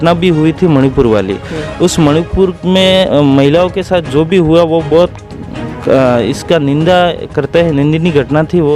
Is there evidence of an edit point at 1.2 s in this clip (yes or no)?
no